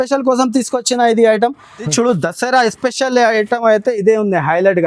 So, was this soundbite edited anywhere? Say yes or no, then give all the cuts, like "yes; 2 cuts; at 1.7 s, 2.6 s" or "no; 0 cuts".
yes; 1 cut; at 1.8 s